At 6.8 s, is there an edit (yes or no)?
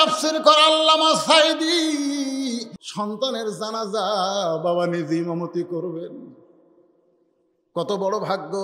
no